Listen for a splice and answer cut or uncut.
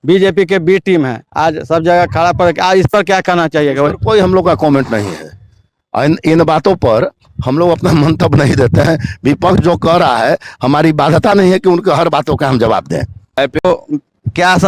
uncut